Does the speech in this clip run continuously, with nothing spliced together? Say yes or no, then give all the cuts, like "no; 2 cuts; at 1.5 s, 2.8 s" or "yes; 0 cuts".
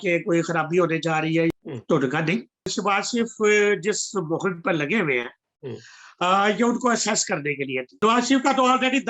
no; 3 cuts; at 1.5 s, 2.7 s, 7.9 s